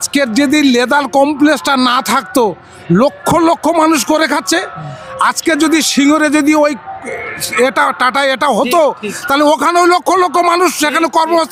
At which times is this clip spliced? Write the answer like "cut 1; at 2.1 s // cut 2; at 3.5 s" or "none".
none